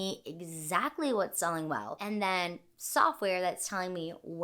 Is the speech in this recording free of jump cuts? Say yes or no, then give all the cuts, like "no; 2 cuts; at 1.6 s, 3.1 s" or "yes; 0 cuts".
no; 1 cut; at 1.9 s